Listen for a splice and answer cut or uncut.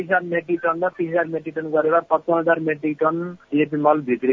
uncut